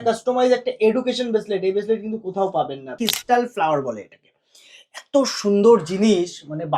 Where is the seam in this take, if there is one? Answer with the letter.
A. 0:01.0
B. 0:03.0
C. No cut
B